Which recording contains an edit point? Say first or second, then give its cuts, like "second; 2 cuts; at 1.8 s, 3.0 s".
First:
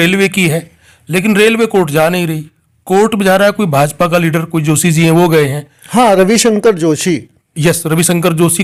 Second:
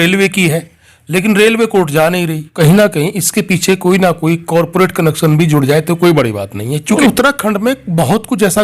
second; 2 cuts; at 2.5 s, 7.0 s